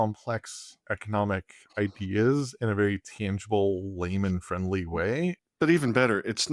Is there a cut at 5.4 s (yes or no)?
yes